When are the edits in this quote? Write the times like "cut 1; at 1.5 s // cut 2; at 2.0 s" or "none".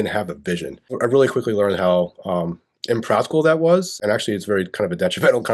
cut 1; at 0.9 s // cut 2; at 4.0 s